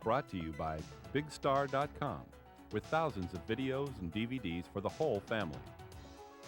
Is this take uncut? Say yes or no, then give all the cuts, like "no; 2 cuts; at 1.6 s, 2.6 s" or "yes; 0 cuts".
no; 1 cut; at 5.5 s